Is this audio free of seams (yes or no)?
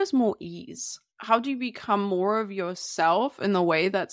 no